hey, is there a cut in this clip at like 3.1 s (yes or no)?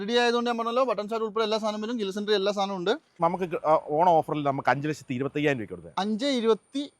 yes